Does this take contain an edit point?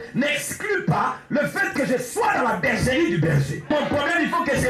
yes; 1 cut; at 3.7 s

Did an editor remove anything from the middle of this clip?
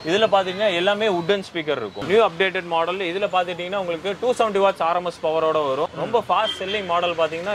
yes; 2 cuts; at 2.0 s, 5.9 s

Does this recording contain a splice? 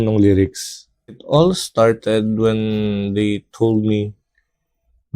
yes; 1 cut; at 1.2 s

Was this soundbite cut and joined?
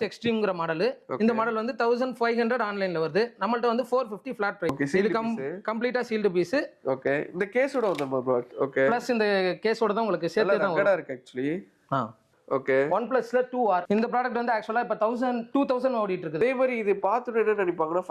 no; 0 cuts

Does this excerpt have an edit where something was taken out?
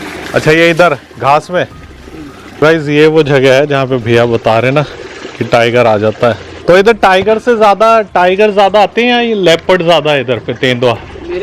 yes; 2 cuts; at 2.6 s, 6.5 s

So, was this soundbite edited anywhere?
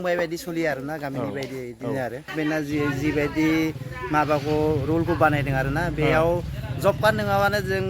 yes; 1 cut; at 2.3 s

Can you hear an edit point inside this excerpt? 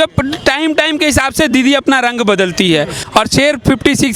yes; 1 cut; at 3.0 s

